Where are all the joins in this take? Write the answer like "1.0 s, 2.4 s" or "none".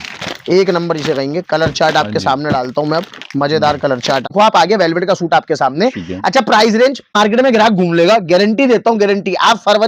4.3 s, 7.1 s